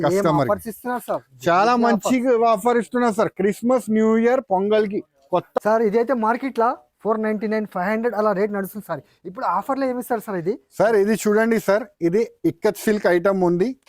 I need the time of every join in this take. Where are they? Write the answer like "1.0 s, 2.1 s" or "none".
5.6 s